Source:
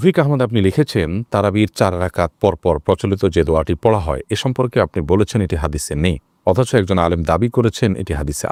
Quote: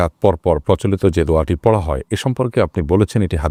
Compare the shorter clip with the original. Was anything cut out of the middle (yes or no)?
no